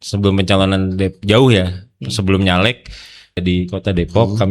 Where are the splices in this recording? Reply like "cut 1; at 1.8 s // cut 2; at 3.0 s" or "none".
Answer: cut 1; at 3.4 s